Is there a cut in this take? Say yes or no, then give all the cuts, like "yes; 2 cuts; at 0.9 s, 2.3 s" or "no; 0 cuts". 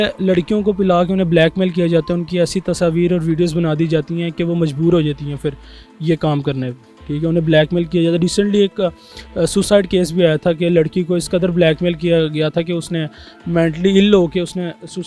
no; 0 cuts